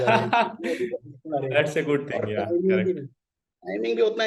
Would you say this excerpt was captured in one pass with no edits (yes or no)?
yes